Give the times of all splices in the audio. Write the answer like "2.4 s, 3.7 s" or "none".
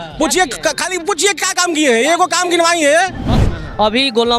3.4 s